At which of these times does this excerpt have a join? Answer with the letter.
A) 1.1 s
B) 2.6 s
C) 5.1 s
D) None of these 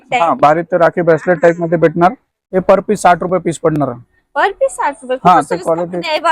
B